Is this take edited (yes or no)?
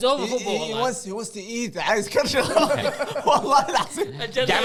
no